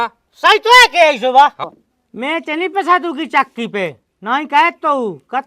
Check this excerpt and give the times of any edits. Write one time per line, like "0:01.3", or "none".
0:01.6